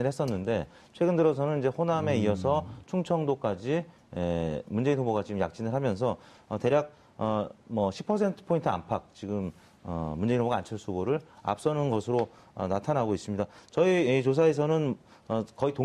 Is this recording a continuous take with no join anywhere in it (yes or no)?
no